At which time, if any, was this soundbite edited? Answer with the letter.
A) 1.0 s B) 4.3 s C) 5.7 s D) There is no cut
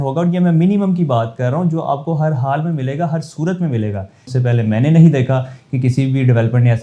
B